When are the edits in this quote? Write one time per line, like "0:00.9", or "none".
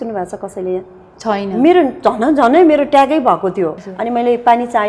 0:03.8